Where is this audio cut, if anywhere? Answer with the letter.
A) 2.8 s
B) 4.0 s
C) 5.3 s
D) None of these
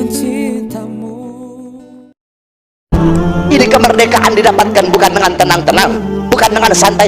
A